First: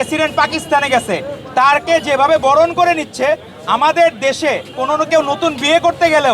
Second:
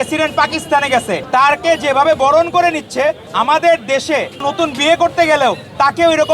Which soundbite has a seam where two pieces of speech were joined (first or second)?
second